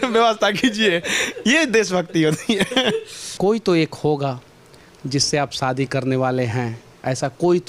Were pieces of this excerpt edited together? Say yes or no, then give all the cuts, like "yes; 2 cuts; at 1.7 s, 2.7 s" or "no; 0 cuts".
yes; 1 cut; at 3.2 s